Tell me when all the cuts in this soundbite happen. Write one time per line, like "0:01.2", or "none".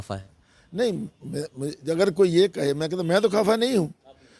none